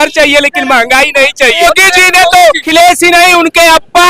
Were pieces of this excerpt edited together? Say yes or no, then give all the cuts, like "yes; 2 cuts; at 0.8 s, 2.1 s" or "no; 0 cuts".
yes; 2 cuts; at 1.6 s, 2.6 s